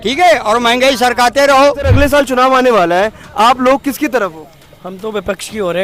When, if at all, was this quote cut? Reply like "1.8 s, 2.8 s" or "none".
1.9 s